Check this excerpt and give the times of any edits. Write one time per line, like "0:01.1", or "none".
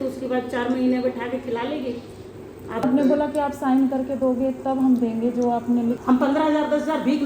0:02.8
0:06.0